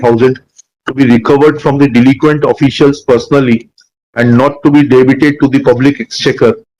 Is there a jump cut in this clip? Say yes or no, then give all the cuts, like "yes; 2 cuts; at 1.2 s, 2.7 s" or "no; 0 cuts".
no; 0 cuts